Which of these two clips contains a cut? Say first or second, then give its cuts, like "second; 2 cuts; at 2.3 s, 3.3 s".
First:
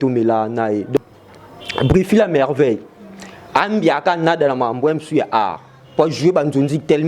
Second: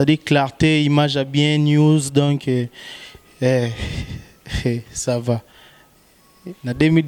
first; 1 cut; at 1.0 s